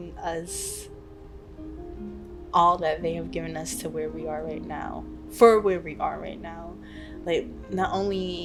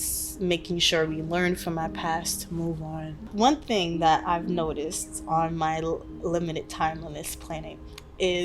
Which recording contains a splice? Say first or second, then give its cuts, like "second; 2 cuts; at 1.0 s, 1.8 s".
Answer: second; 1 cut; at 3.3 s